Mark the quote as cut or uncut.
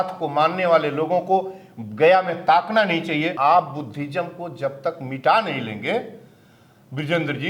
cut